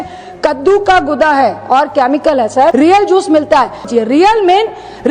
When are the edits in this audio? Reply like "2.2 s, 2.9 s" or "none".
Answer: 2.7 s, 3.8 s